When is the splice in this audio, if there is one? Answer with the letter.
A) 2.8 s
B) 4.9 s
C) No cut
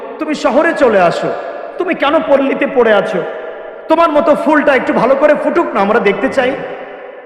C